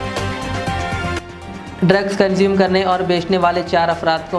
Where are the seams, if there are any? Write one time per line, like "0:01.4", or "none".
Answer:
0:01.1